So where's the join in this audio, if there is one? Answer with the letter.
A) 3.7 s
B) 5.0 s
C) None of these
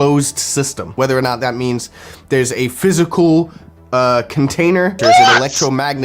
B